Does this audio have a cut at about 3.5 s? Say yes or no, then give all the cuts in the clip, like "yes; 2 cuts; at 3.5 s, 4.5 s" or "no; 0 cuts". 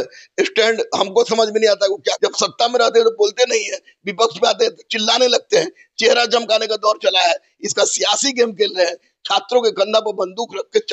no; 1 cut; at 2.1 s